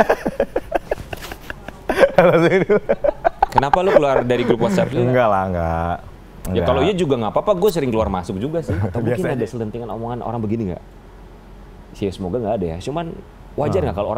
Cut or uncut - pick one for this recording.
cut